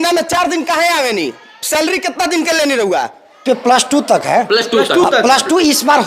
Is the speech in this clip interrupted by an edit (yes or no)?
yes